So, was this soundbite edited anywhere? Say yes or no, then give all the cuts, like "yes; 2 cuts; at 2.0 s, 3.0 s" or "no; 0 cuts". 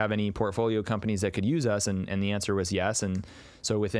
no; 0 cuts